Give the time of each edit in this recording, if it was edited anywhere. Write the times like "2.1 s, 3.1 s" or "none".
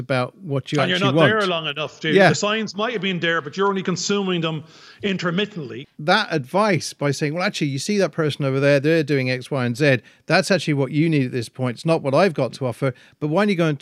5.7 s